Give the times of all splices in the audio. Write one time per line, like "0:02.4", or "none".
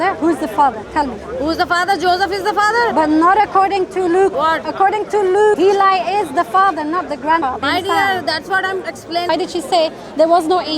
0:02.9
0:04.3
0:05.6
0:07.5
0:09.3